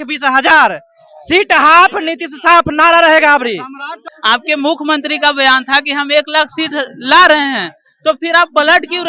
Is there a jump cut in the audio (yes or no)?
yes